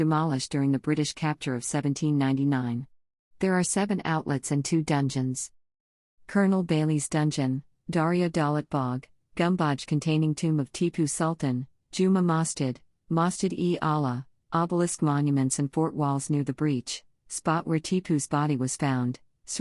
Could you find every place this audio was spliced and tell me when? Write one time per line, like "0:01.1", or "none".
0:05.8